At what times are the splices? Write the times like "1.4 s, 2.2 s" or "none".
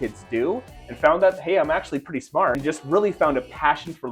2.6 s